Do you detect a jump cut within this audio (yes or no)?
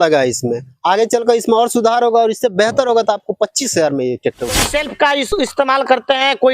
yes